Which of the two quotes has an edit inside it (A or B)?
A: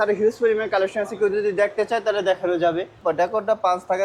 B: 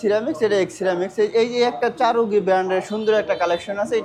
A